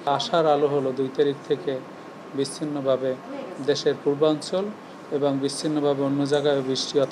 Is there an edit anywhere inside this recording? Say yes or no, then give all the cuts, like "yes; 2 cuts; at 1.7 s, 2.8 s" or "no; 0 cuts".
no; 0 cuts